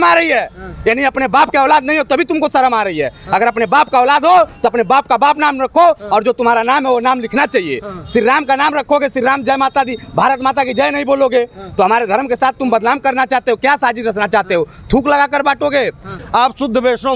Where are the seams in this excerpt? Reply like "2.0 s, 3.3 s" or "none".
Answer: 16.1 s